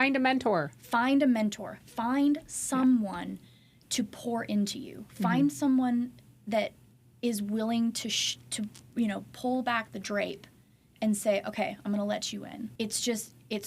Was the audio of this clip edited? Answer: yes; 1 cut; at 12.7 s

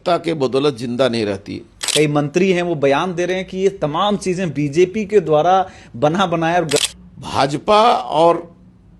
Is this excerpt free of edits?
no; 2 cuts; at 1.7 s, 6.8 s

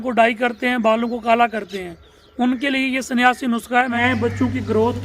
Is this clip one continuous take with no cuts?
no; 1 cut; at 4.0 s

